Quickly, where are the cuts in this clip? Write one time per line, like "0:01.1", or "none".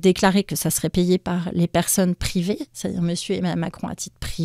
none